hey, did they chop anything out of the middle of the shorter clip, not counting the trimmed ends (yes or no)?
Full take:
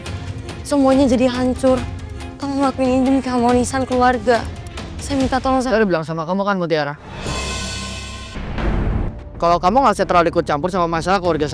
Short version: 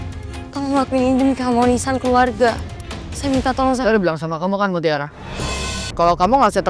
yes